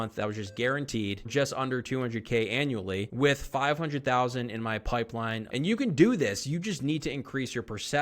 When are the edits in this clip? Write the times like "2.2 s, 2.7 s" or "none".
1.3 s, 5.4 s

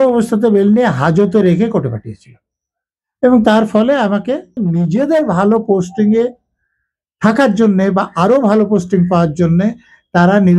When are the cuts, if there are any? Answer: 4.6 s

